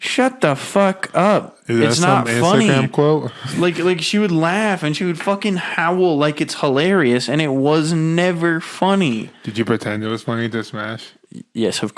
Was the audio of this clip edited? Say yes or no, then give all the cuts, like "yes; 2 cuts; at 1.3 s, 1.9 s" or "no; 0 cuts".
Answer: no; 0 cuts